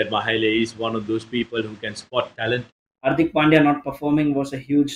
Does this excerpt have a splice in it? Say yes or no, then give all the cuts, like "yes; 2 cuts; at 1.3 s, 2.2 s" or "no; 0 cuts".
yes; 1 cut; at 2.9 s